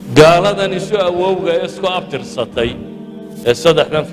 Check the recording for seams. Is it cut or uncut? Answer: cut